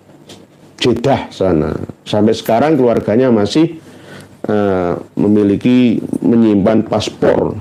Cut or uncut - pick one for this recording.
uncut